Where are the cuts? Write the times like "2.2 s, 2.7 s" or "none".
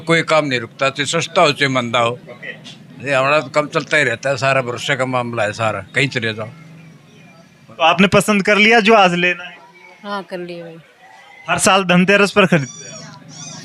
none